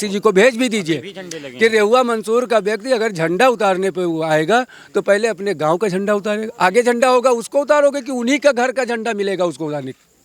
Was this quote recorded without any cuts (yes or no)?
yes